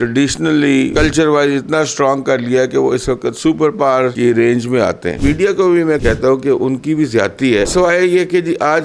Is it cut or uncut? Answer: cut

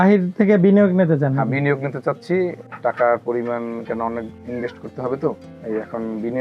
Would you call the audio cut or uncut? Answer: cut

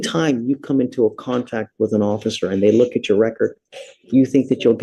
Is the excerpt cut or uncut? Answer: uncut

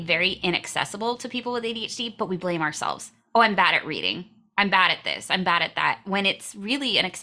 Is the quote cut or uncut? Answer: uncut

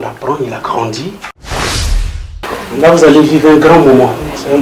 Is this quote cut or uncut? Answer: cut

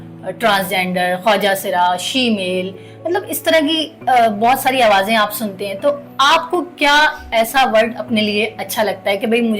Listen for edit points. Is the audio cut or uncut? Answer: uncut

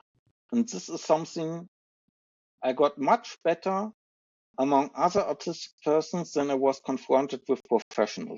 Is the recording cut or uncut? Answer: uncut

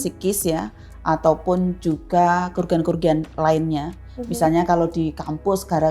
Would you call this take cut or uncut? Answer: uncut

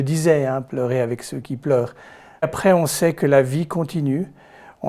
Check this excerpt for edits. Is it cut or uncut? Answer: cut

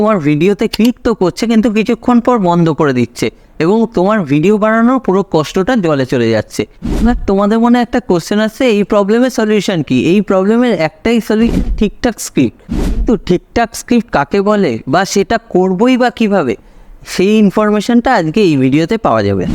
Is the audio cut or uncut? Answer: uncut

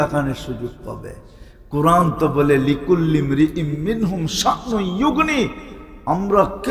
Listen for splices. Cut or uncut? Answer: uncut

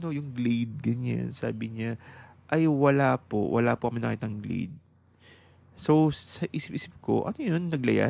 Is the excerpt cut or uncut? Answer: uncut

